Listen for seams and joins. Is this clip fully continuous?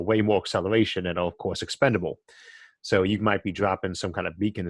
yes; 0 cuts

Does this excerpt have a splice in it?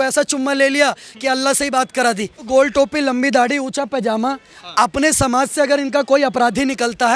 yes; 1 cut; at 2.4 s

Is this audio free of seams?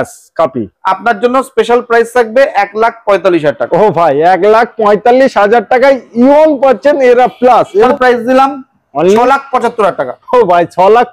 no; 1 cut; at 7.9 s

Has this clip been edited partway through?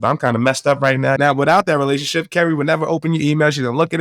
yes; 1 cut; at 1.2 s

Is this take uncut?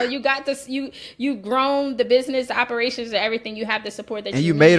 yes; 0 cuts

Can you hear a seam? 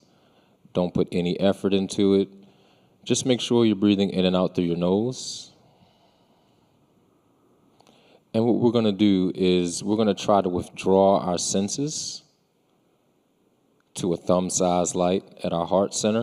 yes; 1 cut; at 9.7 s

